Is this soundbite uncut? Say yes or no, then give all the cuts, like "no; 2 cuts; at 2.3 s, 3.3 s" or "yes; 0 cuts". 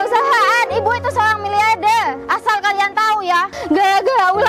no; 2 cuts; at 2.2 s, 3.6 s